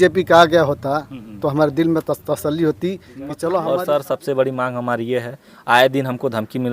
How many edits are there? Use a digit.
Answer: 1